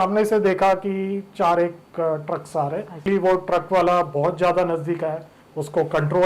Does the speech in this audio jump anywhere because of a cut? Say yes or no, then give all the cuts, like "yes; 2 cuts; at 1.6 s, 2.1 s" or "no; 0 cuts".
yes; 1 cut; at 3.0 s